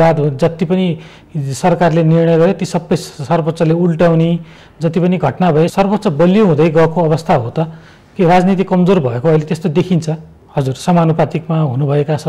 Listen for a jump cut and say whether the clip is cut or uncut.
cut